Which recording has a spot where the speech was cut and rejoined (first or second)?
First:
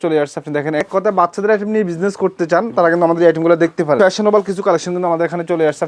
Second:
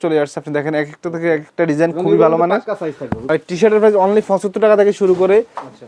first